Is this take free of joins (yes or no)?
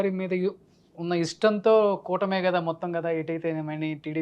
yes